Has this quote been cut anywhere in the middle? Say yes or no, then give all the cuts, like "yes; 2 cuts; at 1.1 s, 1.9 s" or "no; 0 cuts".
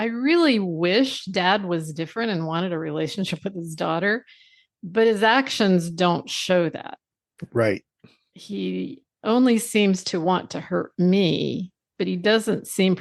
no; 0 cuts